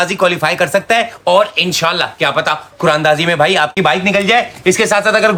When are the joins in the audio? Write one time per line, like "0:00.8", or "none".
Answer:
none